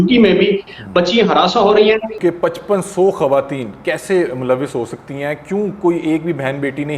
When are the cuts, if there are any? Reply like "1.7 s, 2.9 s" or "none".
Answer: 2.1 s

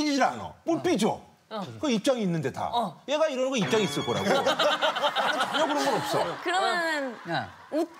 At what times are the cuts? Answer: none

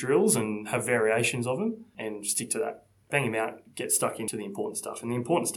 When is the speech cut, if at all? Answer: 1.9 s, 3.1 s, 4.3 s

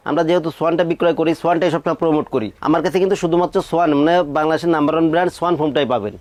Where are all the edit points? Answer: none

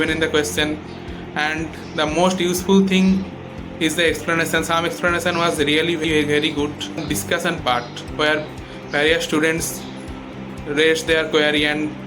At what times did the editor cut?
6.0 s, 7.0 s

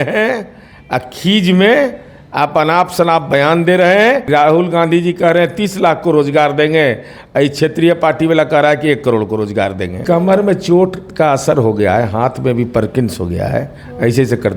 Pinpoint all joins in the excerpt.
4.2 s, 9.9 s

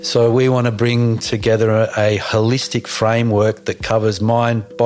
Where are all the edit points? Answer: none

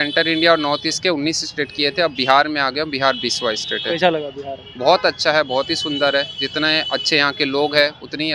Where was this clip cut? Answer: none

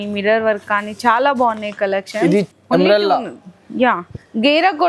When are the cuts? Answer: 2.5 s

